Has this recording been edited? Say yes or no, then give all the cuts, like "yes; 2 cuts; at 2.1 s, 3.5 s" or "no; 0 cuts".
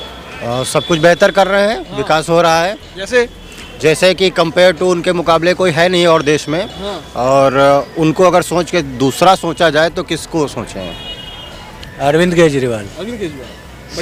no; 0 cuts